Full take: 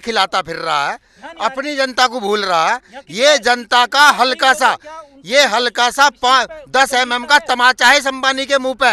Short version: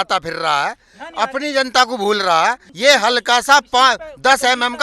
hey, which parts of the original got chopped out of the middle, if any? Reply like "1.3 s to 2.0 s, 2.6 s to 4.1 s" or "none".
2.9 s to 5.2 s

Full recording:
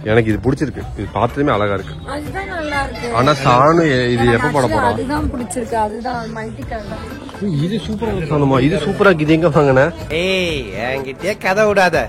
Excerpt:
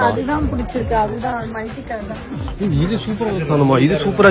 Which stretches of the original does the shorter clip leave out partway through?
none

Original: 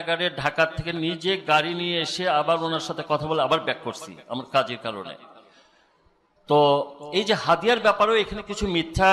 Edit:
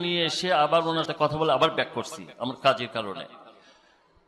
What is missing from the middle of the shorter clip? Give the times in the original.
2.8 s to 3.0 s

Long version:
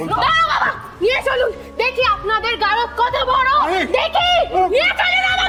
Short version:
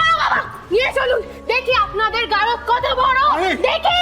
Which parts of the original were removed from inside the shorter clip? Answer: none

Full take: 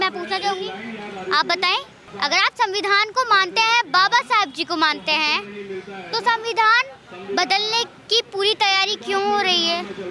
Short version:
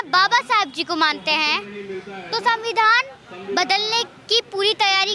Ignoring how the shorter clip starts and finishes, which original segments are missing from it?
none

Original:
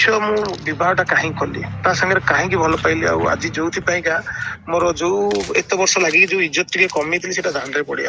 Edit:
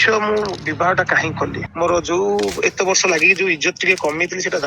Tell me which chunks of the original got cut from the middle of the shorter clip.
1.6 s to 4.5 s

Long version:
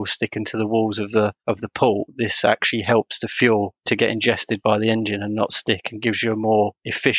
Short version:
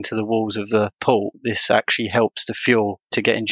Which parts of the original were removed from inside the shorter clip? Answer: 1.4 s to 1.7 s

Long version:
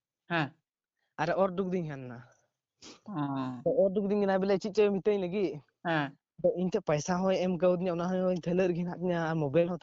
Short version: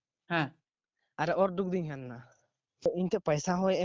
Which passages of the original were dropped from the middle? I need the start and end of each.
2.9 s to 6.5 s

